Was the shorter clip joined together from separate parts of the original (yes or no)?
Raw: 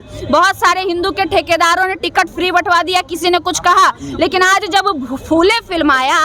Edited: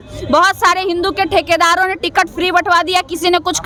no